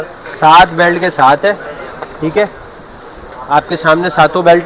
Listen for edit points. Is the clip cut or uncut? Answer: uncut